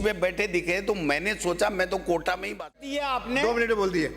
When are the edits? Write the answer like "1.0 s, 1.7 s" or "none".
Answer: 2.8 s

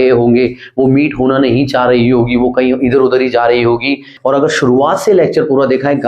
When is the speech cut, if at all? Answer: 4.1 s

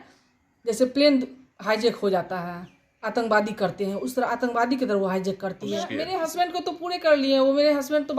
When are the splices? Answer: 5.9 s

